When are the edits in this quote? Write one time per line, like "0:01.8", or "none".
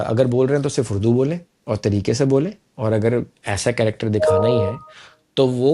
none

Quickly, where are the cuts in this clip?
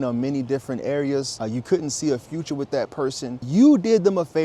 0:01.3
0:03.4

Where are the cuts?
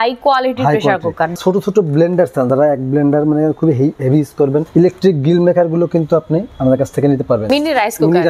0:01.3
0:02.5
0:04.7
0:06.5
0:07.4

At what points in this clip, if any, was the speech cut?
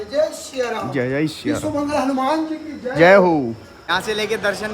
0:03.7

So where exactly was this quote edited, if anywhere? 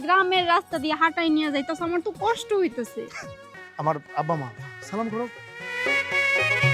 0:03.1

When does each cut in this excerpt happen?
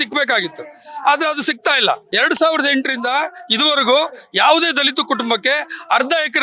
0:02.1

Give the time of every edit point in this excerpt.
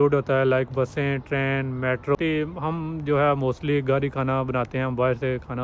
0:02.2

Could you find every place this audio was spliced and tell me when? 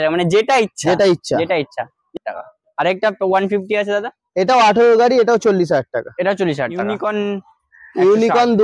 0:02.1
0:06.9

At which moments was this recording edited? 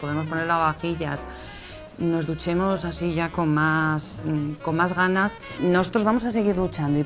0:05.5

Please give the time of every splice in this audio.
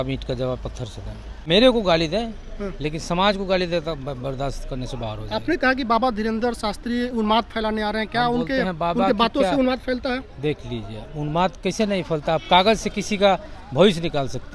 0:01.4

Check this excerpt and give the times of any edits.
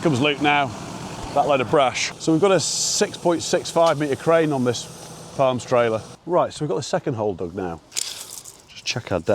0:02.1
0:06.2

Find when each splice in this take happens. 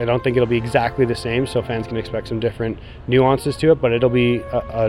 none

